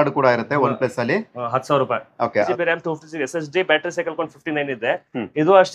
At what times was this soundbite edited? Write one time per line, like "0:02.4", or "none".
0:02.5